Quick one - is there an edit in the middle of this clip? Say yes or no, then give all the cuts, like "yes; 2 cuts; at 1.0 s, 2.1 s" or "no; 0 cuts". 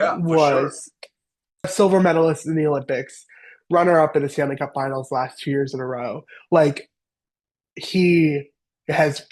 yes; 1 cut; at 1.7 s